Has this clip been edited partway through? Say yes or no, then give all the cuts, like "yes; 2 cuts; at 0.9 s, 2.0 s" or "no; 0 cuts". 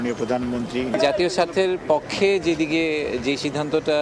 yes; 1 cut; at 0.9 s